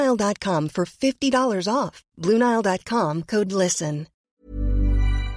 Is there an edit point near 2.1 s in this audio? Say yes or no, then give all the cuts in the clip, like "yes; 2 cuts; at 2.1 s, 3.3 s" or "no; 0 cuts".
no; 1 cut; at 4.2 s